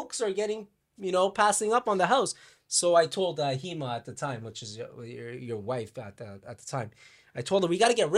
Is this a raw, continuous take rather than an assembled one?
yes; 0 cuts

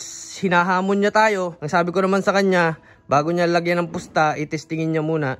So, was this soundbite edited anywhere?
no; 0 cuts

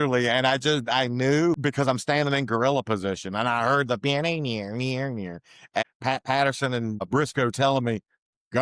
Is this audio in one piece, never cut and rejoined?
no; 3 cuts; at 1.6 s, 5.8 s, 7.1 s

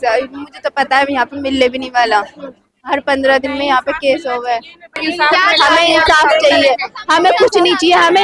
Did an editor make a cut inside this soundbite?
yes; 1 cut; at 5.0 s

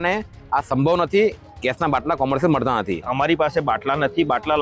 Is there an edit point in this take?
yes; 1 cut; at 3.1 s

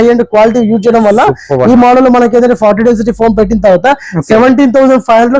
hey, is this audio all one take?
yes; 0 cuts

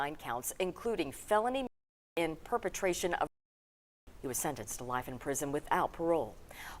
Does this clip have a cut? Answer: no; 0 cuts

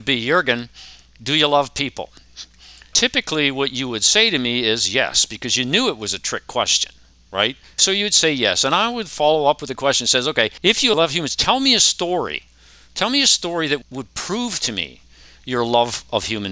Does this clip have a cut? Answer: yes; 4 cuts; at 3.0 s, 7.8 s, 10.7 s, 13.8 s

